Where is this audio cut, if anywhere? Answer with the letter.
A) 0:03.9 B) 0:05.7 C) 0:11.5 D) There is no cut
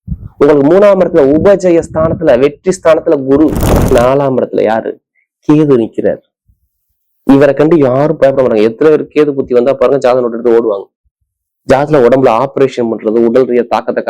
A